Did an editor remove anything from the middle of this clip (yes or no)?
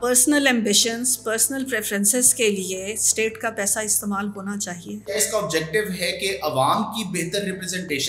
yes